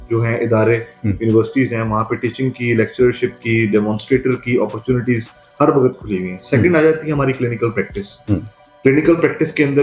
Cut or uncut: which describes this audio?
uncut